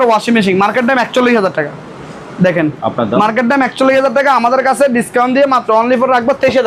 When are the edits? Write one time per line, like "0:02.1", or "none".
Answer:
none